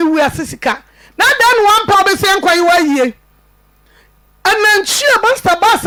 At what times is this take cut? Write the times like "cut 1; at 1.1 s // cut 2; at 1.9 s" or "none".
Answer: none